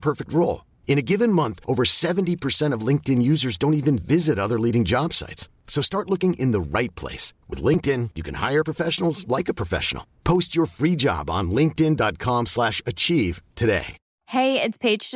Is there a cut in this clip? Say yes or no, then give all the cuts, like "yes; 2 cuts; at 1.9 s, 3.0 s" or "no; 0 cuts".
yes; 1 cut; at 14.0 s